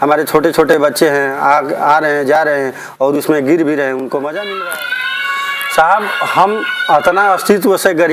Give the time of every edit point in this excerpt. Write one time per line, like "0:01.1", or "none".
0:04.6